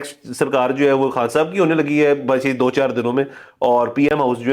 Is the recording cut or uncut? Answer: uncut